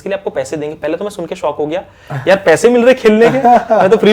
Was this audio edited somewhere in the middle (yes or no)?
no